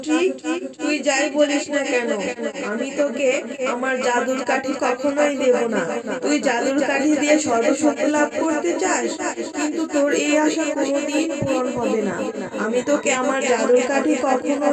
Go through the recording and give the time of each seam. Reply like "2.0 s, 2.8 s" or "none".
none